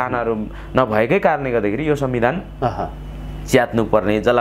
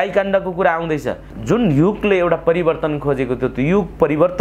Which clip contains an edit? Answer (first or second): second